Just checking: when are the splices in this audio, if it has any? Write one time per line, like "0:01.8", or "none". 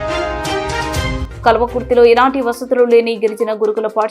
0:01.2